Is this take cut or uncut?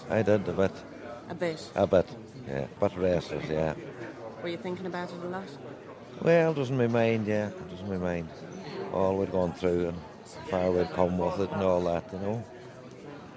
cut